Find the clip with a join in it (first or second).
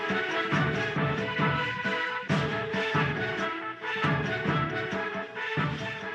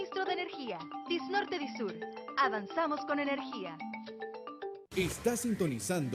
second